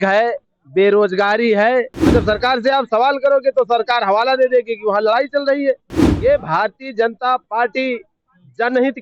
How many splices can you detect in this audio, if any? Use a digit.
1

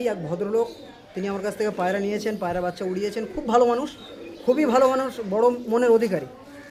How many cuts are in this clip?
0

